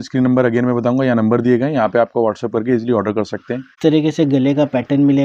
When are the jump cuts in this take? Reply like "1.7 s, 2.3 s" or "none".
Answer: 3.7 s